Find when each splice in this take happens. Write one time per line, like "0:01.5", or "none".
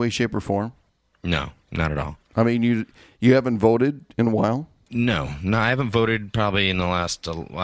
0:04.8